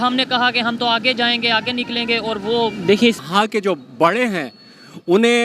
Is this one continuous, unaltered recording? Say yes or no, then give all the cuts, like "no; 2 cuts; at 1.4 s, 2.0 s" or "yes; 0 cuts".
no; 1 cut; at 3.2 s